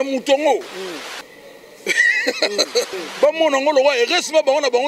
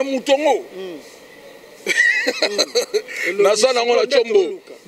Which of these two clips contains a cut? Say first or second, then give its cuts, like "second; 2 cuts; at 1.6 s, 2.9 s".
first; 1 cut; at 2.9 s